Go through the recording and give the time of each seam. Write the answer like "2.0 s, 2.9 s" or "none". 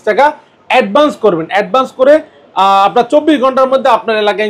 none